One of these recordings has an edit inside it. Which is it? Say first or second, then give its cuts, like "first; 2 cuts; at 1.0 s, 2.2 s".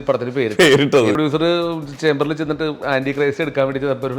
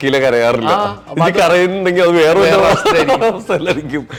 first; 1 cut; at 1.2 s